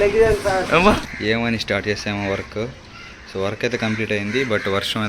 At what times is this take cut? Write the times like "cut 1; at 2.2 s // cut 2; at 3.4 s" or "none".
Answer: cut 1; at 1.1 s